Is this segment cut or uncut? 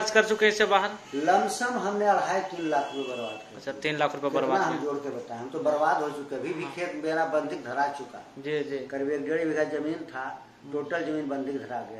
uncut